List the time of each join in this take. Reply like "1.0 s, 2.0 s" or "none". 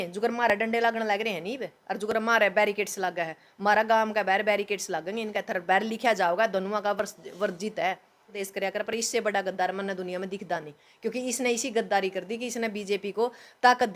8.4 s